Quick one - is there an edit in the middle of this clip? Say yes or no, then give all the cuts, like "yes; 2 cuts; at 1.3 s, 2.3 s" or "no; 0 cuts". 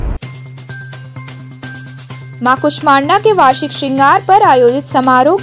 yes; 1 cut; at 1.3 s